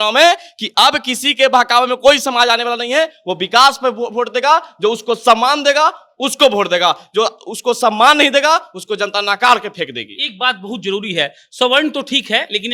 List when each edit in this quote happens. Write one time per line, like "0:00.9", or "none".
none